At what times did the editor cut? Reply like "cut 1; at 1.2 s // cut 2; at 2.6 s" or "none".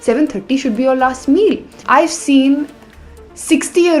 cut 1; at 1.7 s